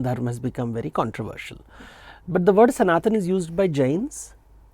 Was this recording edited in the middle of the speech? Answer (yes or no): no